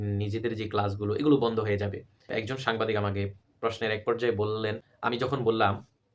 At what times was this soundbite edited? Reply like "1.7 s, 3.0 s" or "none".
2.3 s